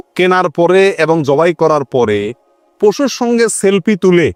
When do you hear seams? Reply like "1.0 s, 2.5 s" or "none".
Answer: none